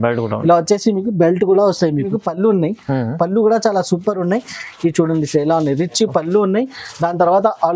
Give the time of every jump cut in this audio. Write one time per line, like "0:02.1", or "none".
0:02.2